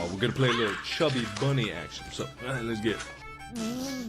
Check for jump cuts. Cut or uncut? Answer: cut